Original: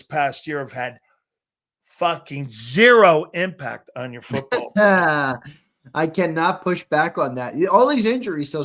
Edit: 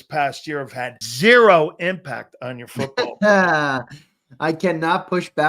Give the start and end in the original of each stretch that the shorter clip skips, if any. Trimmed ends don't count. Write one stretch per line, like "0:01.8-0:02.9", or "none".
0:01.0-0:02.6